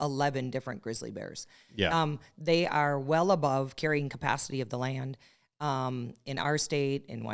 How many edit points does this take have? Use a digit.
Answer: 0